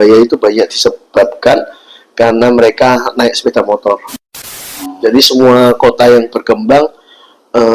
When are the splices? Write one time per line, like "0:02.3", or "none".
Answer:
0:04.3